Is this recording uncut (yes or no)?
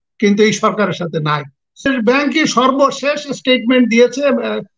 no